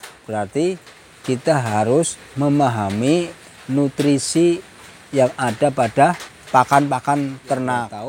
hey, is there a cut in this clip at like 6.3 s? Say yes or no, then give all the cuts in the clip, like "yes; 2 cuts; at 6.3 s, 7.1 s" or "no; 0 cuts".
yes; 1 cut; at 6.3 s